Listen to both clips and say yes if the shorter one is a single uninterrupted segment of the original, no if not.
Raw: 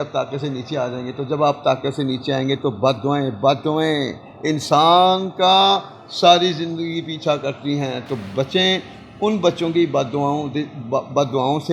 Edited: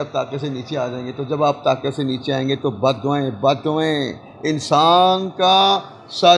yes